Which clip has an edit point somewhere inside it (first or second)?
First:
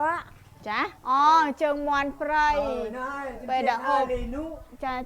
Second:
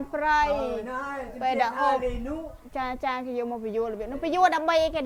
first